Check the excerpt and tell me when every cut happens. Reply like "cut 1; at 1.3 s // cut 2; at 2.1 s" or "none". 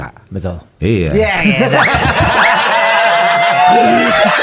none